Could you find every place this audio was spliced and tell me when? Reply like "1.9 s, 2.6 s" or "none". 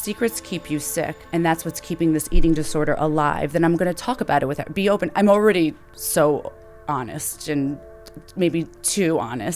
1.2 s